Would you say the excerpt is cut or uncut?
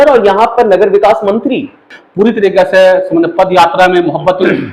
cut